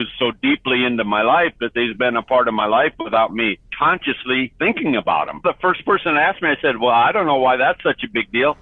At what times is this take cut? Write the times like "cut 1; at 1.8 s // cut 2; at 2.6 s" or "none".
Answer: cut 1; at 5.4 s